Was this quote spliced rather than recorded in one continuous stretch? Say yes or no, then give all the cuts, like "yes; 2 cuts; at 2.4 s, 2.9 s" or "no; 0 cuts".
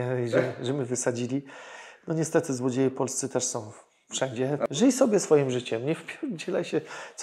yes; 1 cut; at 4.6 s